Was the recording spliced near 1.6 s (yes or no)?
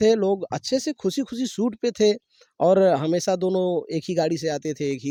no